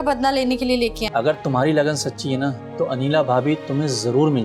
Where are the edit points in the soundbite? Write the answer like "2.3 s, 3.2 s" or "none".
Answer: 1.0 s